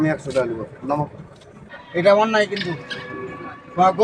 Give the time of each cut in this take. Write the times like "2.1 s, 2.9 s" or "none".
1.7 s